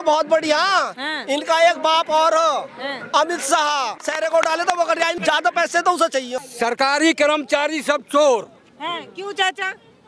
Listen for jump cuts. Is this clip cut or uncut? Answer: cut